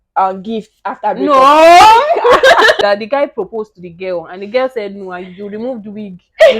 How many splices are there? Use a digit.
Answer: 1